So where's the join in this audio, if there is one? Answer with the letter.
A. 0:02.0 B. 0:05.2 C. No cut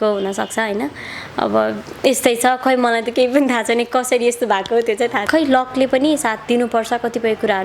B